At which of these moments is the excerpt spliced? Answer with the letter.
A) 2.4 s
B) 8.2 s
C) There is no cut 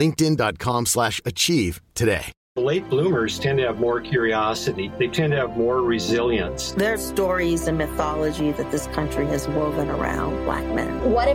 A